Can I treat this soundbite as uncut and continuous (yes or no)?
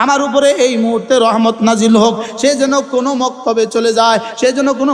yes